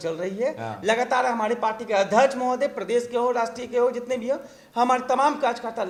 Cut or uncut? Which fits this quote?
uncut